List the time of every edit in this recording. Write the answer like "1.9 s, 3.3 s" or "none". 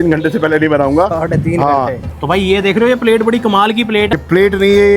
2.1 s, 4.1 s